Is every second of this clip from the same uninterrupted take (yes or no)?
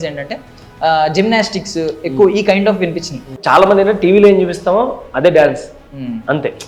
no